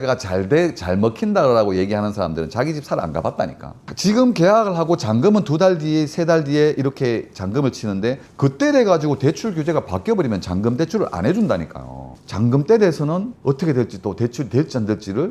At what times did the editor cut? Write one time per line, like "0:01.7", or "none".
0:03.9
0:12.2